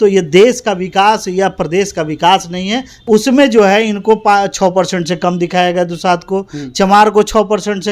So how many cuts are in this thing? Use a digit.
1